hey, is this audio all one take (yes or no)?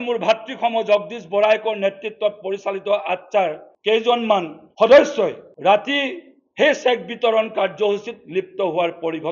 no